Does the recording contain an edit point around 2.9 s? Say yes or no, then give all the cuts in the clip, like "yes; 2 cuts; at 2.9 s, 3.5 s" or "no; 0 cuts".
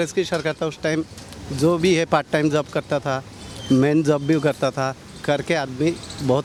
no; 0 cuts